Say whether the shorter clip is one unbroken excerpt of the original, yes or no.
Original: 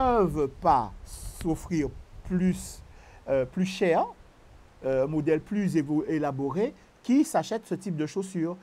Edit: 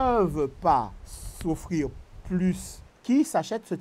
no